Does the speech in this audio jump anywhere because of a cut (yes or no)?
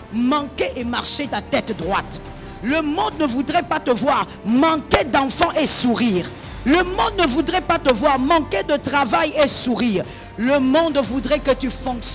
no